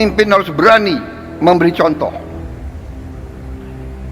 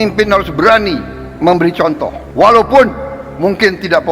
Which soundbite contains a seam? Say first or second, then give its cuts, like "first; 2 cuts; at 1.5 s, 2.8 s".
second; 1 cut; at 2.2 s